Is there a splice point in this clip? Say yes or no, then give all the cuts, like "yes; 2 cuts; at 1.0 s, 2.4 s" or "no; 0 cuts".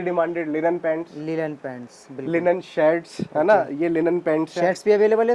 no; 0 cuts